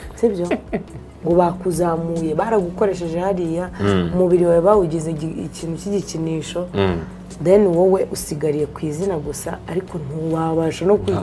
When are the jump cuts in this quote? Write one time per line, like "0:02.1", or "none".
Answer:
0:01.1